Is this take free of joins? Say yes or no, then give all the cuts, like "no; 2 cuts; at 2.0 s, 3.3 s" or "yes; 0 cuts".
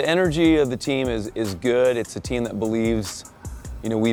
yes; 0 cuts